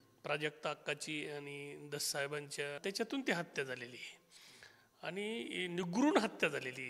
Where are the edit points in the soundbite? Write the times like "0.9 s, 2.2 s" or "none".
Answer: 2.8 s